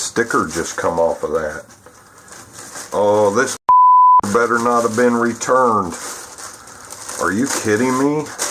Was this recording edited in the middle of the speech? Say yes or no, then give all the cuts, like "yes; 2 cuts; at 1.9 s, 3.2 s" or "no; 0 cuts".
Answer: no; 0 cuts